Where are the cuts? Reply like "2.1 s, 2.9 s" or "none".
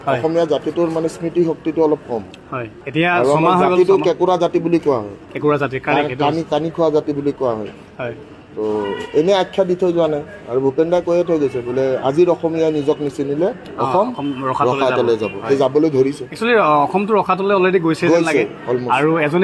none